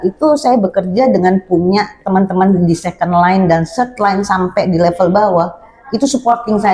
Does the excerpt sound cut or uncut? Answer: uncut